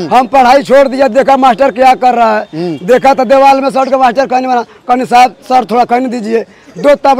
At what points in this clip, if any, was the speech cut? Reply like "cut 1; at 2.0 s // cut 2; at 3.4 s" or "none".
none